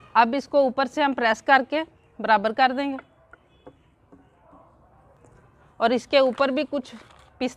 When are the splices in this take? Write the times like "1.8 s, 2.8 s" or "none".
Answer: 5.1 s